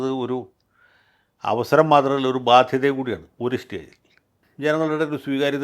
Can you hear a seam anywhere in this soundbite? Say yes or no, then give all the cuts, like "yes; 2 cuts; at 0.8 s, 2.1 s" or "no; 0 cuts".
yes; 1 cut; at 4.5 s